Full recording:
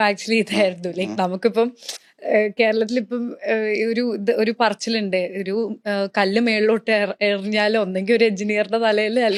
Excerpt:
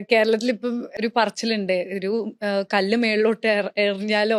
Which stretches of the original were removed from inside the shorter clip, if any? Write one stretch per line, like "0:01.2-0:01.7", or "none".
0:03.5-0:04.4